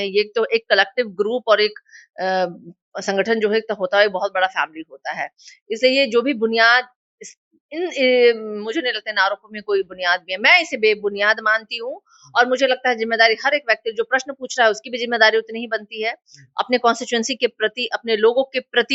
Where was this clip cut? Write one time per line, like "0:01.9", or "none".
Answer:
none